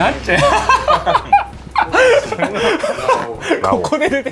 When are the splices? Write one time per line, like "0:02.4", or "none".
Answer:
none